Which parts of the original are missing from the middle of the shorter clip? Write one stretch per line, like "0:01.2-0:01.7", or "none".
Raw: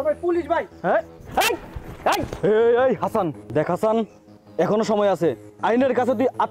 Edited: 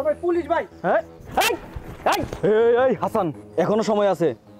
0:03.4-0:04.4